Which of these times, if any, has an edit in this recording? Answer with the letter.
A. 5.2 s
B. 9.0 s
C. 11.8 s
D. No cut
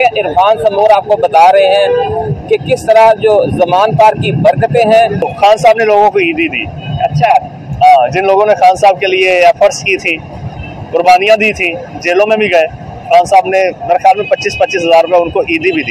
A